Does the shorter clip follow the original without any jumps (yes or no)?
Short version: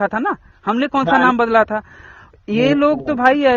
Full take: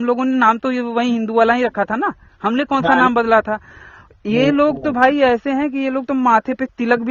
yes